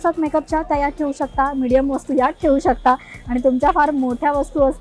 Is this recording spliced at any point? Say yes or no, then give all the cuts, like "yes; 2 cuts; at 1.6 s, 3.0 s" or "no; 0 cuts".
no; 0 cuts